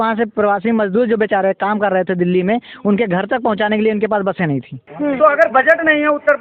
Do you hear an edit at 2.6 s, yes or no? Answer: no